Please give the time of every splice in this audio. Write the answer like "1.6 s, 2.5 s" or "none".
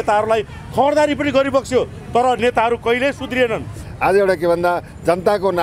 3.8 s

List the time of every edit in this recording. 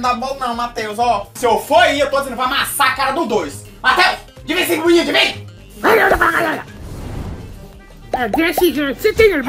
none

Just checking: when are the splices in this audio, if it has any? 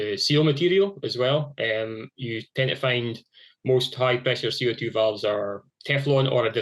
none

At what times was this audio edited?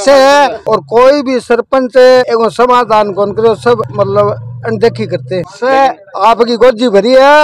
none

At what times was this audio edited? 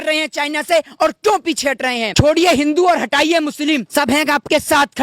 2.1 s, 3.9 s

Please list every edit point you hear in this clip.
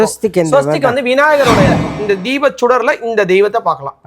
1.9 s

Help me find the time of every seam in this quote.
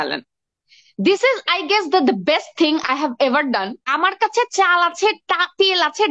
3.8 s

